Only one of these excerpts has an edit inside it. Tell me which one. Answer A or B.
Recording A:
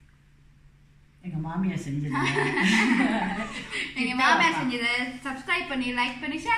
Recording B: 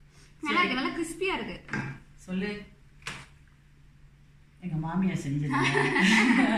B